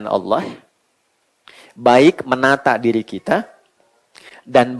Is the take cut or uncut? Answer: uncut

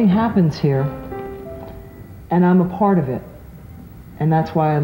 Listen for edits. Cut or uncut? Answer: uncut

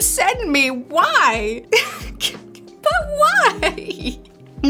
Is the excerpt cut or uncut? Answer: uncut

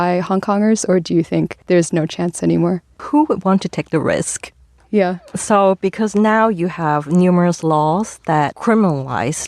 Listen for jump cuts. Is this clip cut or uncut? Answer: cut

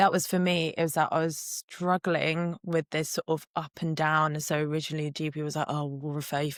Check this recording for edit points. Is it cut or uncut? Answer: uncut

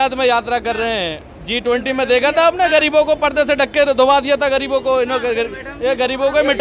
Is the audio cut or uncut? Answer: uncut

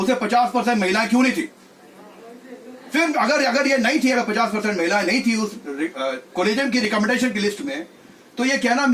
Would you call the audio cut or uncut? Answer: uncut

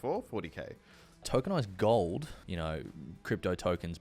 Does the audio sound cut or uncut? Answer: cut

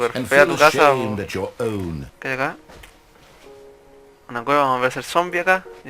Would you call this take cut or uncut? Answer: cut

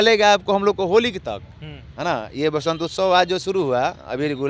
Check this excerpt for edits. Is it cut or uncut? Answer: uncut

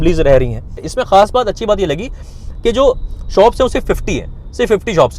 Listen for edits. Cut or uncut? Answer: cut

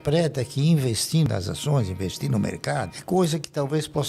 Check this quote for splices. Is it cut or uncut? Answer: cut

